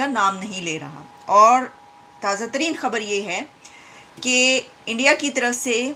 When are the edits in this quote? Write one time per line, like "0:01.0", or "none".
none